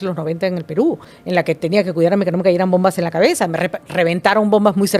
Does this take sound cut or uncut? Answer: cut